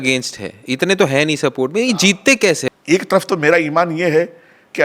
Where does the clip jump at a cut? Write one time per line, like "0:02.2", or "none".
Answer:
0:02.6